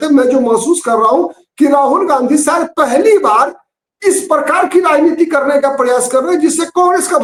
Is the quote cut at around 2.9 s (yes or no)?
no